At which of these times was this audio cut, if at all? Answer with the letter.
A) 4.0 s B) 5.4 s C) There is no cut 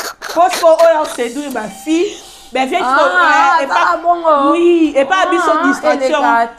C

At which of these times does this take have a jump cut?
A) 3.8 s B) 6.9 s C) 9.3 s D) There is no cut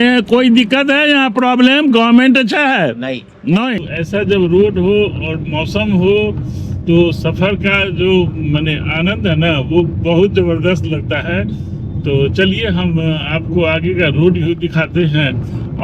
A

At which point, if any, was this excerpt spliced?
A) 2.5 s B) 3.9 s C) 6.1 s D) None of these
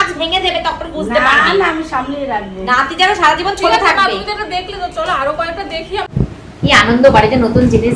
C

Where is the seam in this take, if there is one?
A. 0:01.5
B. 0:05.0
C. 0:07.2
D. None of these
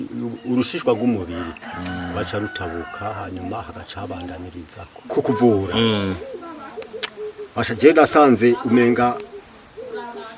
B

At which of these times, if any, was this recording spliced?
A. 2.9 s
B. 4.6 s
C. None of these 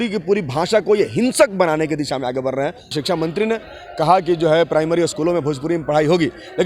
A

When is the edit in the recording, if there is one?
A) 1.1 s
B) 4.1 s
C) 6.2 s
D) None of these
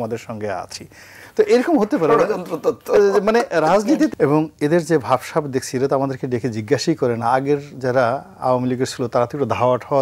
B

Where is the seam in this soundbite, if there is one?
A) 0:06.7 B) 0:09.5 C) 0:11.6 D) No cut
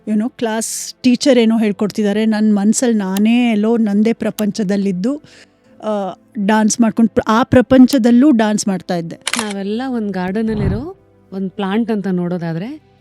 B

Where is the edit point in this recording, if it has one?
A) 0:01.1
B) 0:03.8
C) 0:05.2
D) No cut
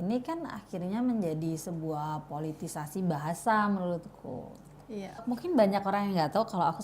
C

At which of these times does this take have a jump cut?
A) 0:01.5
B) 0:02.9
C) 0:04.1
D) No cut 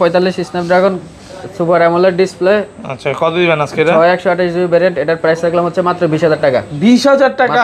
D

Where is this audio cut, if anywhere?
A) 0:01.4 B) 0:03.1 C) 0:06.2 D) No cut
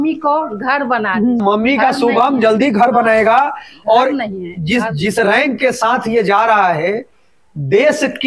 A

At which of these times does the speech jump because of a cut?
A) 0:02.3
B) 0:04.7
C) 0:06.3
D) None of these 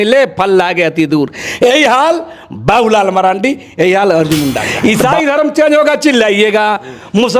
B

